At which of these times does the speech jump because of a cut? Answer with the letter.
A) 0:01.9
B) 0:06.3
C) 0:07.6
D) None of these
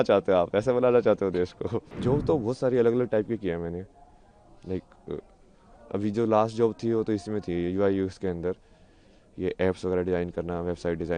A